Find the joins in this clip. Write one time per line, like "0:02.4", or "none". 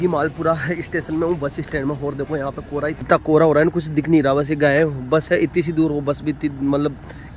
0:03.0